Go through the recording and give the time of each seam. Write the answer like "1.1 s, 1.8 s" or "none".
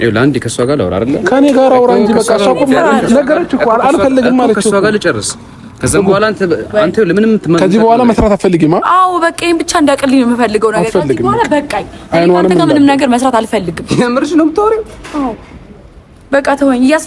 none